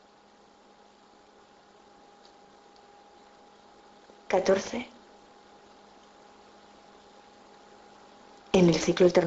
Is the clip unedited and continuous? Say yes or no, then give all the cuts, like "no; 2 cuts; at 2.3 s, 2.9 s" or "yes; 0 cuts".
no; 1 cut; at 1.0 s